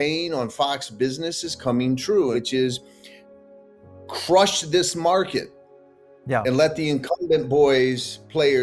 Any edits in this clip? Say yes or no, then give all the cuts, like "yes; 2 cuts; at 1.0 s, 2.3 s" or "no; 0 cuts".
yes; 1 cut; at 2.3 s